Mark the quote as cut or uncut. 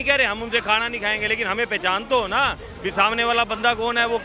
uncut